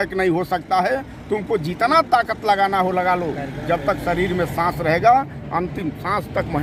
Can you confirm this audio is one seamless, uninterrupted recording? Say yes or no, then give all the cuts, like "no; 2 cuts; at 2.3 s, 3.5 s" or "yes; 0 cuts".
yes; 0 cuts